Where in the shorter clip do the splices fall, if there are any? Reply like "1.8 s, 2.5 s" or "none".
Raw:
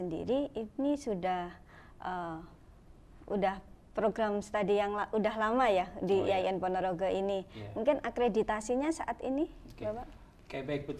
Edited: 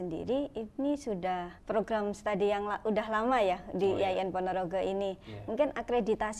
1.5 s